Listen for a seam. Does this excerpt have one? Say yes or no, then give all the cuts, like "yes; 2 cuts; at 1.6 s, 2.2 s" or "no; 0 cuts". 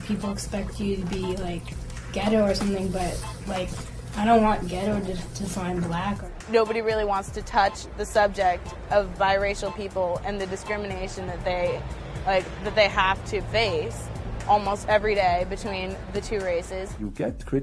yes; 1 cut; at 6.3 s